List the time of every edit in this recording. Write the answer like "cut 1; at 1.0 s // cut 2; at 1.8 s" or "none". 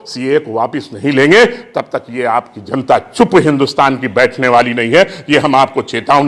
none